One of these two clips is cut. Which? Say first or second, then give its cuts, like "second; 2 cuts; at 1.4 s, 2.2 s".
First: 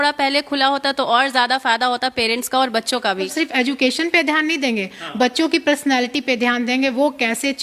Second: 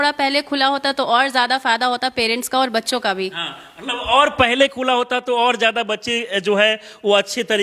first; 1 cut; at 3.3 s